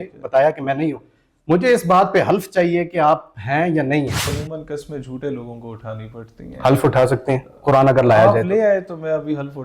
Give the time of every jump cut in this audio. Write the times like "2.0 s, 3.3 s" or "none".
4.3 s

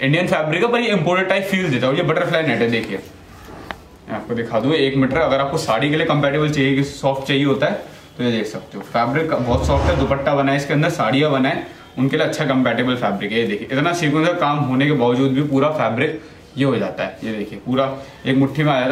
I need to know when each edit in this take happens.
none

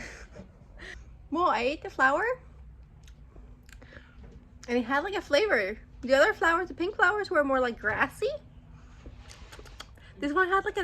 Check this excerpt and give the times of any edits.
0.9 s

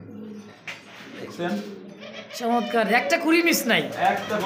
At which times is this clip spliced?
none

